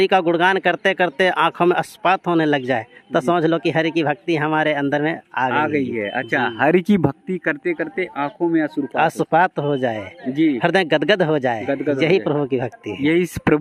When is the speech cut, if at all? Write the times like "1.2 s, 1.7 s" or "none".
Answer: none